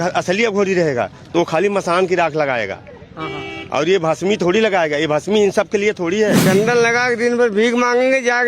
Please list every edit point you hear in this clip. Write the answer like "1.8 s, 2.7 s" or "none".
6.4 s